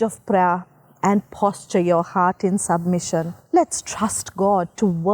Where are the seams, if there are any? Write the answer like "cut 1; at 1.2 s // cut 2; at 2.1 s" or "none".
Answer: cut 1; at 3.4 s